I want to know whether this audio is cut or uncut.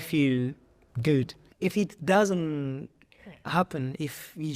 cut